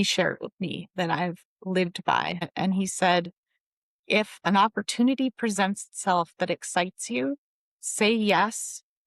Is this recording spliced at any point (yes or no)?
yes